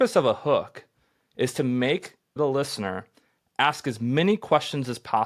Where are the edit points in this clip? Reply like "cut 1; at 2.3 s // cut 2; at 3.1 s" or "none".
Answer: cut 1; at 2.4 s